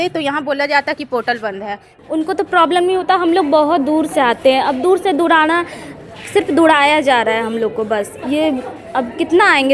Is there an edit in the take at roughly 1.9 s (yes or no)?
yes